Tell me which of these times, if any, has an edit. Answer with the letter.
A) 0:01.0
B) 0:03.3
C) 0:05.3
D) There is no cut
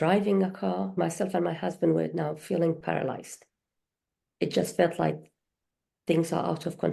A